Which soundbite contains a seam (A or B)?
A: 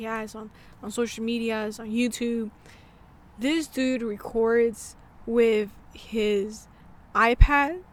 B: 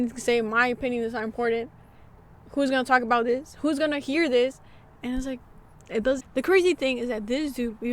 B